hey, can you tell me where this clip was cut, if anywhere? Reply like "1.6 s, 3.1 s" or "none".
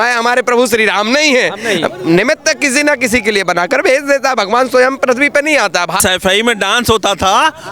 6.0 s